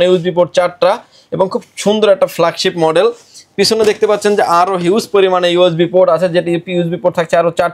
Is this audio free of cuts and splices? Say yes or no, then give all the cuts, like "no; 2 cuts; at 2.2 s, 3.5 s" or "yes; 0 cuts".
yes; 0 cuts